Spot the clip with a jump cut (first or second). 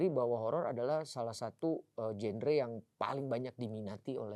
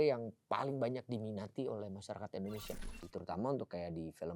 second